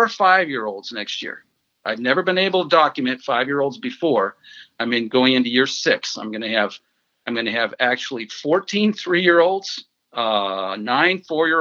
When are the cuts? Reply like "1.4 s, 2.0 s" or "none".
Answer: none